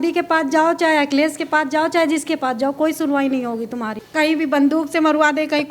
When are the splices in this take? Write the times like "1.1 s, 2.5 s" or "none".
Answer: 4.0 s

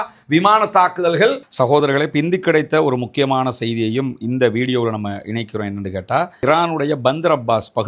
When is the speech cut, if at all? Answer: 1.4 s, 6.4 s

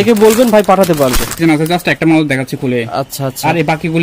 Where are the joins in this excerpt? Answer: 1.3 s

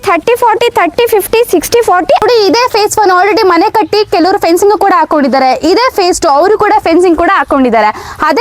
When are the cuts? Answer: 2.2 s

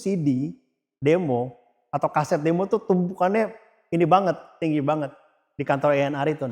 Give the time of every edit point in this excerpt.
none

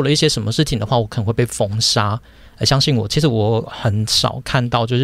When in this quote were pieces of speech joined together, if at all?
none

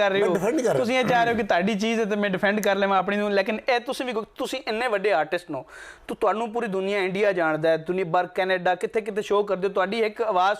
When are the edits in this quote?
none

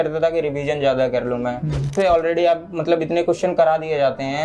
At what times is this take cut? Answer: 1.9 s

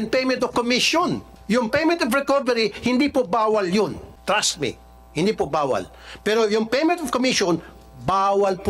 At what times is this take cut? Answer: 1.3 s, 4.1 s

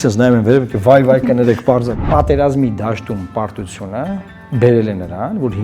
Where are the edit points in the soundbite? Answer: 2.0 s, 4.3 s

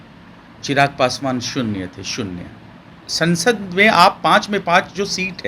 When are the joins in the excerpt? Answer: 3.1 s

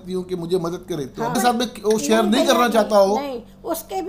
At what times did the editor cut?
1.4 s

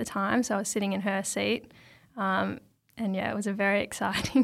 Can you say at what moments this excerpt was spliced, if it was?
none

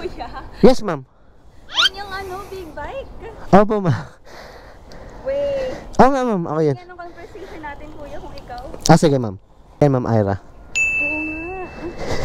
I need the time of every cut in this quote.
9.8 s

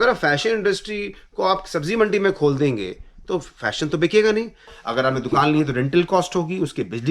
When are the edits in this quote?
4.7 s

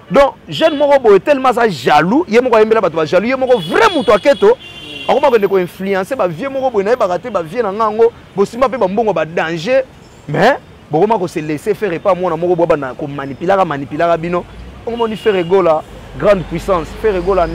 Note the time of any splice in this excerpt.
none

